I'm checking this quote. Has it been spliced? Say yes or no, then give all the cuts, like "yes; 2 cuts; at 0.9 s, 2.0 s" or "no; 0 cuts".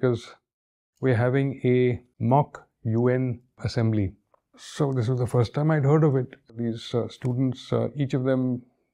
yes; 4 cuts; at 2.1 s, 3.6 s, 4.6 s, 6.6 s